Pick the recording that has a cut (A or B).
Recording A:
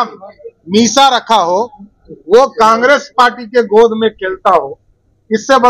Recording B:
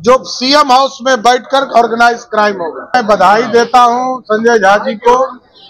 B